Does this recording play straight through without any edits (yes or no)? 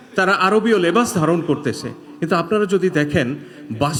yes